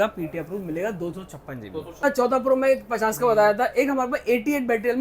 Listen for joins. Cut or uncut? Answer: cut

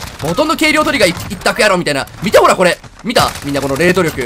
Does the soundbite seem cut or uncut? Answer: uncut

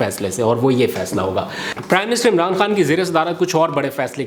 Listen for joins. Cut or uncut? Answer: uncut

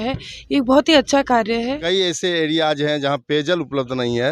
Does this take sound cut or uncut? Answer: cut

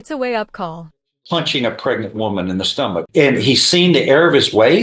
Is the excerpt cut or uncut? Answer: cut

